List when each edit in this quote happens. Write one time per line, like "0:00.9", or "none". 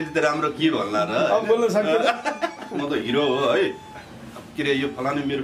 0:02.8